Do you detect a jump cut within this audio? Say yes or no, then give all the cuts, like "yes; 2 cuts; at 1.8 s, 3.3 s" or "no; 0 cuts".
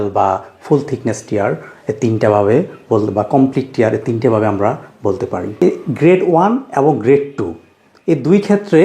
yes; 1 cut; at 5.6 s